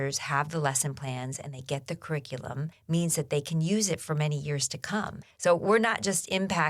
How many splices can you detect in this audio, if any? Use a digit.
2